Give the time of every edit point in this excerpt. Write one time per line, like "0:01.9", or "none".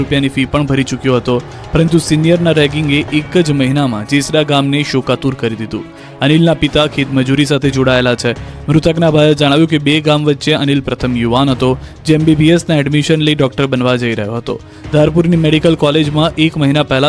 none